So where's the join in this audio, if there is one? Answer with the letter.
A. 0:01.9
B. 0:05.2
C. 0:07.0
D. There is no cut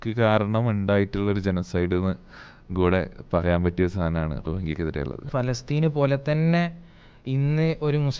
B